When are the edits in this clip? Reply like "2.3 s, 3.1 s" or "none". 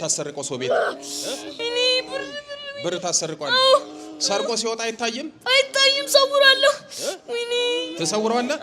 1.5 s